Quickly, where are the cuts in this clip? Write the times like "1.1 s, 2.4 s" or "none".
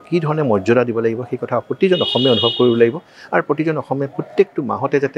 none